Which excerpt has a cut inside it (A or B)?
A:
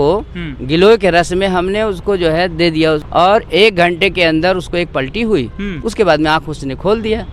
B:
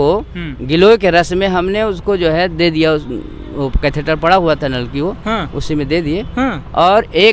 A